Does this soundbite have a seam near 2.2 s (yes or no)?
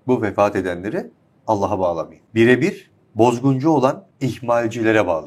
yes